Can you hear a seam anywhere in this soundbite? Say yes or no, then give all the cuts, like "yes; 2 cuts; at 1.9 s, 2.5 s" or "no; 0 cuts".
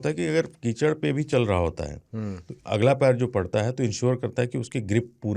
no; 0 cuts